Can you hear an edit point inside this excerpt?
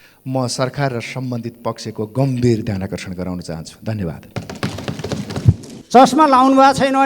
yes; 1 cut; at 5.7 s

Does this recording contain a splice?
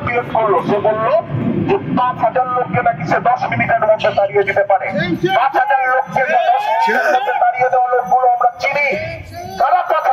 no; 0 cuts

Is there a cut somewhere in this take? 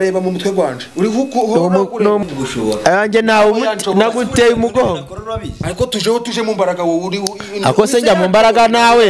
yes; 1 cut; at 2.2 s

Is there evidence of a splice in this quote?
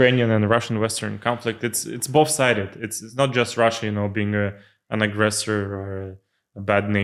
no; 0 cuts

